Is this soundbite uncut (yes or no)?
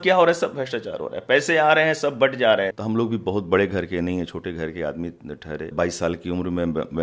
no